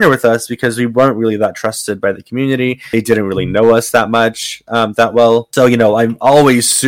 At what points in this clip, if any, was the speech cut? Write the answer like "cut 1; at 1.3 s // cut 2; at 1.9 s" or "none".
none